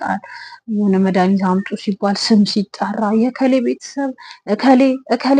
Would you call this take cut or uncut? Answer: uncut